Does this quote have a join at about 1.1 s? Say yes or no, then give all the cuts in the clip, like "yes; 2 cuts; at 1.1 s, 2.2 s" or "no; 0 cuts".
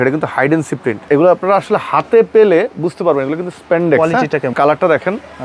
yes; 2 cuts; at 1.1 s, 4.5 s